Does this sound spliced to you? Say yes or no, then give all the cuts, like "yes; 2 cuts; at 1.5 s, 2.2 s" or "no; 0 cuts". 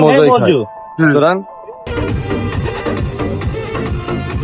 yes; 1 cut; at 1.9 s